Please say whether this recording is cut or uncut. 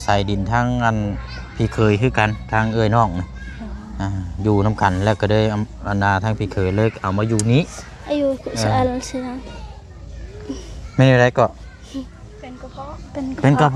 uncut